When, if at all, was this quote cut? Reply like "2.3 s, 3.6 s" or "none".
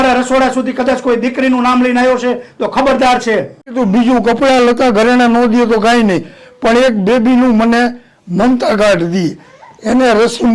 3.7 s